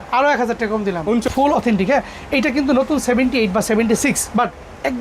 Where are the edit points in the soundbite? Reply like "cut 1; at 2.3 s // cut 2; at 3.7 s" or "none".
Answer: cut 1; at 1.3 s